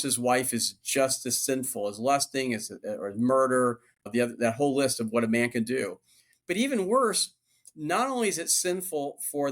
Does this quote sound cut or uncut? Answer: cut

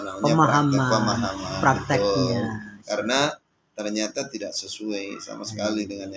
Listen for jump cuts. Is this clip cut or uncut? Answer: uncut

